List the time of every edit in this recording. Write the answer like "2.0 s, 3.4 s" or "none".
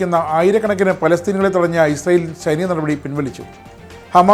none